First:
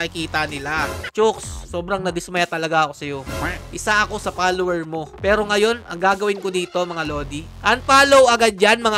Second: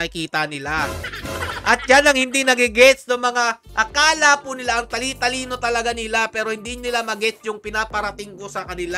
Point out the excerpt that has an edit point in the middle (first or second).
first